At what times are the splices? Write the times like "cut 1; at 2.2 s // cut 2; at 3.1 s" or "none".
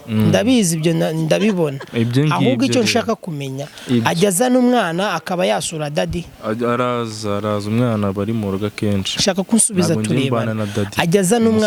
none